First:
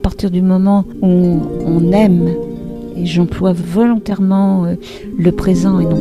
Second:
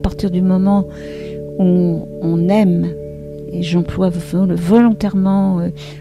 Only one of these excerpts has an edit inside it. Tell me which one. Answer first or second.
first